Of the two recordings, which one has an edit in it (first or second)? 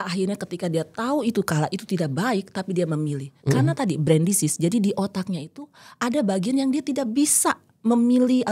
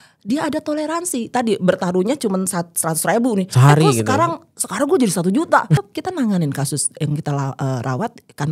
second